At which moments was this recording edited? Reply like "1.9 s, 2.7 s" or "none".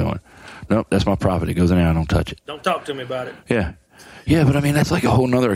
2.4 s